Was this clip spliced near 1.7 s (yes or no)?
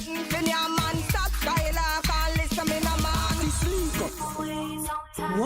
no